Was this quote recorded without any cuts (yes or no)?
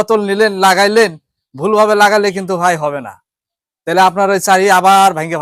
yes